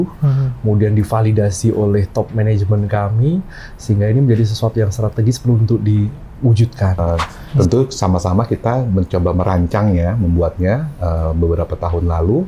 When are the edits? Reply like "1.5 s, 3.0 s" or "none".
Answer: 7.0 s

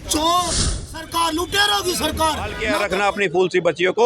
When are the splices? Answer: 1.0 s, 2.6 s

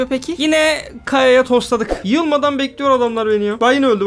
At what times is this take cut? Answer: 2.0 s

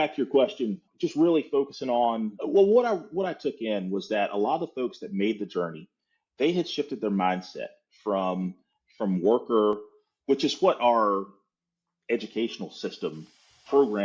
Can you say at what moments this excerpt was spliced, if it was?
0.8 s, 2.3 s

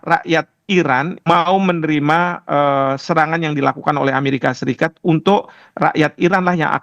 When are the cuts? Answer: 1.1 s

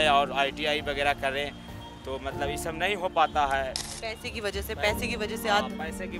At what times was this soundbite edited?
3.9 s

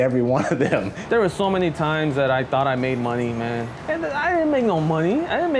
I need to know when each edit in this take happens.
1.0 s, 3.7 s

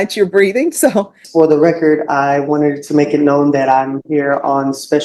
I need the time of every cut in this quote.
1.2 s

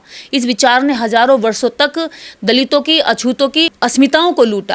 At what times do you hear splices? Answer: none

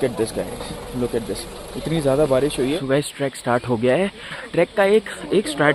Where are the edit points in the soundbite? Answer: 2.8 s, 4.4 s

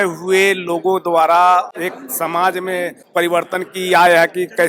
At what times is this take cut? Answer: 1.7 s, 3.0 s

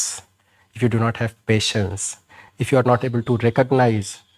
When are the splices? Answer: none

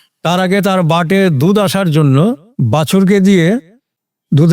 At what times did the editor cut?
none

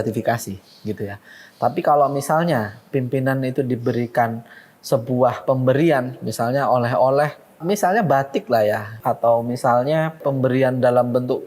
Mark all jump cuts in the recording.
7.6 s, 9.0 s, 10.2 s

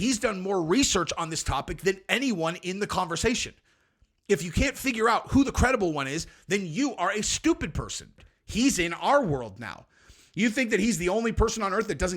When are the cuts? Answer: 8.3 s

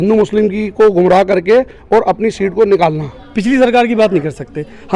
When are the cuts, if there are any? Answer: 3.2 s

